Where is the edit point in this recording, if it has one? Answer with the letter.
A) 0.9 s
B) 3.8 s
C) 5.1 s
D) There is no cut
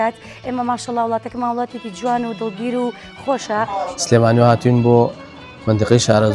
B